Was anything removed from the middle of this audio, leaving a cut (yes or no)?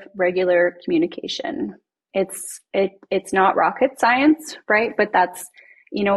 no